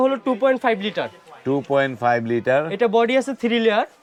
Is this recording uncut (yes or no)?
yes